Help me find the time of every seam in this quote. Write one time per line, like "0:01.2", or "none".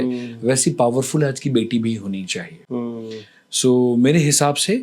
none